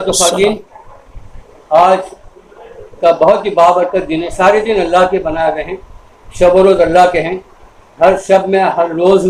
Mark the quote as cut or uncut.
uncut